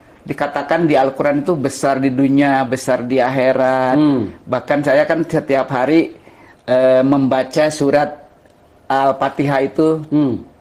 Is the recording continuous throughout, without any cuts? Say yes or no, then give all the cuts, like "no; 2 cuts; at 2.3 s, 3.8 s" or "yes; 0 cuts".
yes; 0 cuts